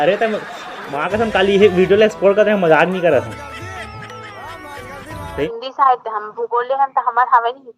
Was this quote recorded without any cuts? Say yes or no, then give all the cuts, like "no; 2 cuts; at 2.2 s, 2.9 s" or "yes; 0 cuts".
no; 1 cut; at 5.5 s